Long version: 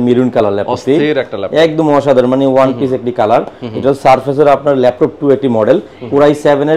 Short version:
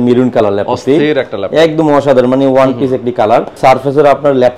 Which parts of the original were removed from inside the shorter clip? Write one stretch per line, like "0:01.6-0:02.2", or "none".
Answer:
0:03.6-0:04.0